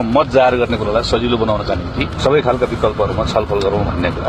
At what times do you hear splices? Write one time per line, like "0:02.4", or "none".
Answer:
0:02.1